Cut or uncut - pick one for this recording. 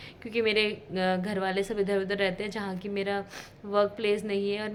uncut